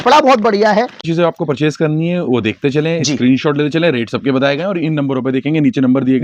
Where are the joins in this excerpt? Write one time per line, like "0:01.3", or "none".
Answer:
0:01.1